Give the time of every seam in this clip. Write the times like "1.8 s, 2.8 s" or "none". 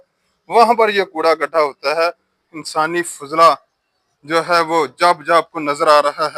2.4 s